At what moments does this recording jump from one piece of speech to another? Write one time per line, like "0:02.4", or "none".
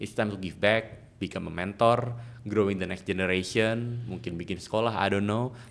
none